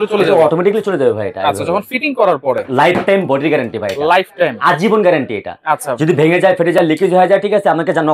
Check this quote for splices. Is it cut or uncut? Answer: cut